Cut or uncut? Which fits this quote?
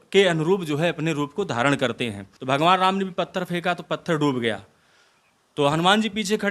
cut